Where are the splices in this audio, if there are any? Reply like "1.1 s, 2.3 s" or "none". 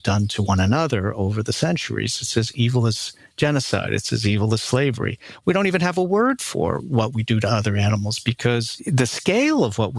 none